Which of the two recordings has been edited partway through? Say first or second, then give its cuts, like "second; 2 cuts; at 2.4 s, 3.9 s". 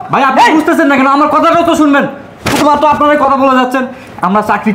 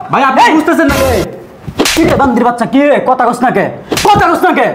second; 1 cut; at 1.0 s